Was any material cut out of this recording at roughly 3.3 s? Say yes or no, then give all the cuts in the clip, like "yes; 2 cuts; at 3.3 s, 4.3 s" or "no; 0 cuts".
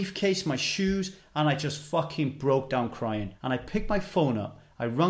yes; 1 cut; at 3.3 s